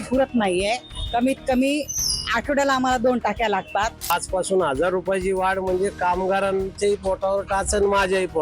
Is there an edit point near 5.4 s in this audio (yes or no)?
no